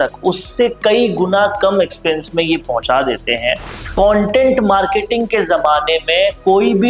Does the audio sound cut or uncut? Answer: cut